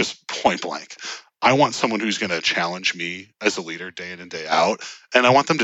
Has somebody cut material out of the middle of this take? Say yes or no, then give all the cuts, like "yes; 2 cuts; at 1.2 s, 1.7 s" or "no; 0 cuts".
no; 0 cuts